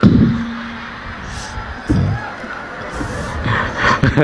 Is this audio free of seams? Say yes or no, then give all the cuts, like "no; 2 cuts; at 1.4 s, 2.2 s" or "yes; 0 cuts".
yes; 0 cuts